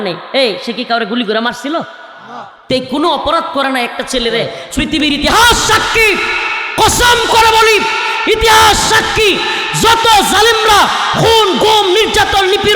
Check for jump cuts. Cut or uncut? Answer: cut